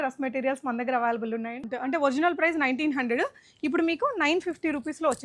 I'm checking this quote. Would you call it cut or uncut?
cut